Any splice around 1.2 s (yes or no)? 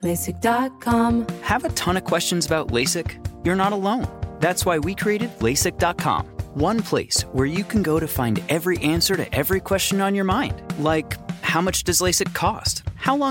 yes